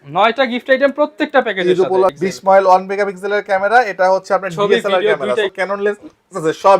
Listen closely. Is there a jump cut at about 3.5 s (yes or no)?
no